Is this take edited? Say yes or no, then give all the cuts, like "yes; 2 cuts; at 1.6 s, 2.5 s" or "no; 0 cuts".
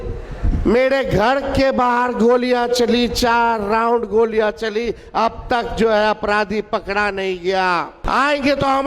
yes; 1 cut; at 8.0 s